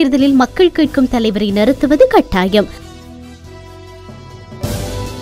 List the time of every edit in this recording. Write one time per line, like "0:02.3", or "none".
0:02.8
0:04.3

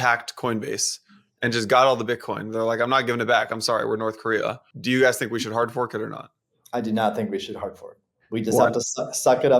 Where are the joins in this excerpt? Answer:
0:04.7

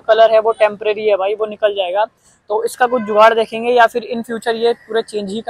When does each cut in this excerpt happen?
none

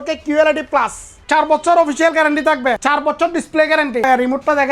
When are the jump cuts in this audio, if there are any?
0:01.2
0:02.8
0:04.0

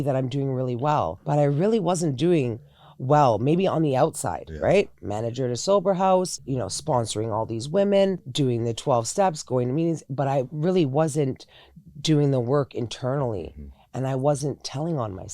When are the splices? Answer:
0:01.2
0:06.4
0:08.3

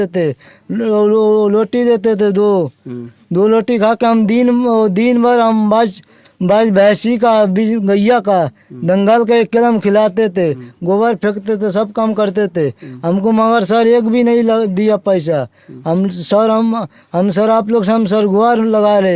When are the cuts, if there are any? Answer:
none

